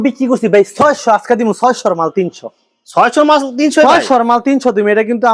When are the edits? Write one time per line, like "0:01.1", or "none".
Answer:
none